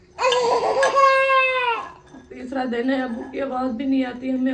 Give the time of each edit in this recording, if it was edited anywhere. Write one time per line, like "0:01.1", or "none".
0:01.8